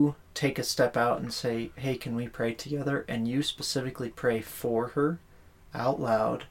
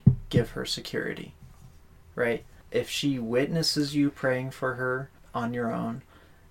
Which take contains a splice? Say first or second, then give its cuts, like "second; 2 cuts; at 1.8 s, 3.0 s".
second; 2 cuts; at 2.5 s, 5.2 s